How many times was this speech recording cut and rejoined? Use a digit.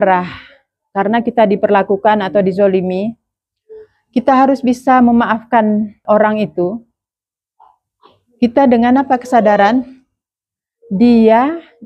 1